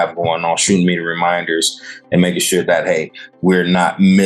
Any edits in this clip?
no; 0 cuts

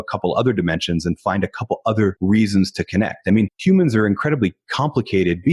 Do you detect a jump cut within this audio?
yes; 2 cuts; at 2.2 s, 3.5 s

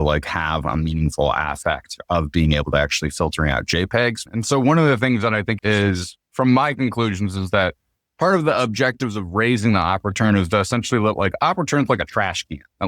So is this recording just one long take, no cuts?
no; 2 cuts; at 4.2 s, 5.6 s

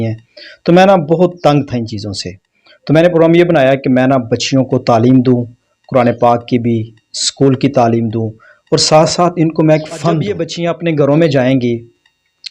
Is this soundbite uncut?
no; 1 cut; at 10.5 s

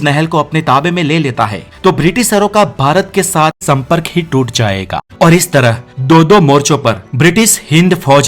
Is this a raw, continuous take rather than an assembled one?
no; 2 cuts; at 3.6 s, 5.0 s

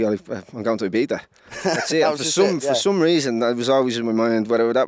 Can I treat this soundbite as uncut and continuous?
yes; 0 cuts

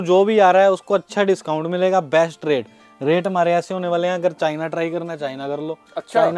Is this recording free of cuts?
yes; 0 cuts

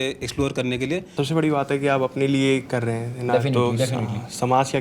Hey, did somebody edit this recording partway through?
yes; 1 cut; at 1.1 s

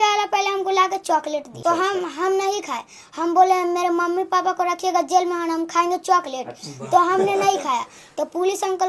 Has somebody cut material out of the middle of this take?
yes; 1 cut; at 1.6 s

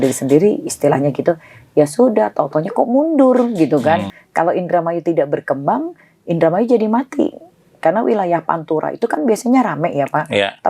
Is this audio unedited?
no; 1 cut; at 4.2 s

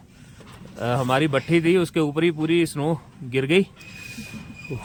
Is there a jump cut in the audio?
no; 0 cuts

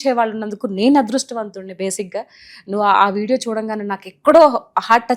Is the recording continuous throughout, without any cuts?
yes; 0 cuts

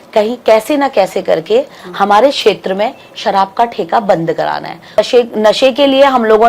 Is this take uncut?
no; 1 cut; at 5.0 s

